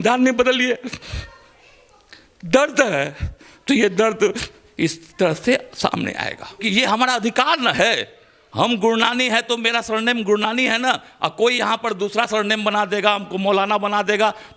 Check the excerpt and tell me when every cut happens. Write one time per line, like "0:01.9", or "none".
0:06.6